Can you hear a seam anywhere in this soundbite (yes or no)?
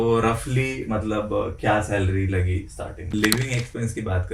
yes